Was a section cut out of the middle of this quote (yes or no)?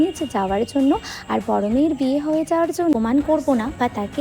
yes